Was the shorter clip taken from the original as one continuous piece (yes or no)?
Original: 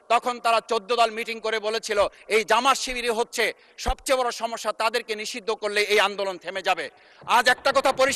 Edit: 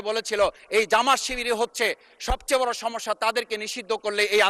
yes